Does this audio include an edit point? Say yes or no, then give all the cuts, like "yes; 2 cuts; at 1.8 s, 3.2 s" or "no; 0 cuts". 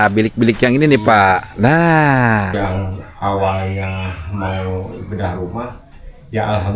yes; 1 cut; at 2.5 s